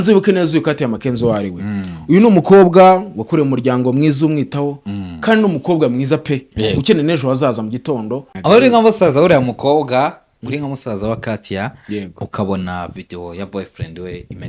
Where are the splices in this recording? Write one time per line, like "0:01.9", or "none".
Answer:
0:08.3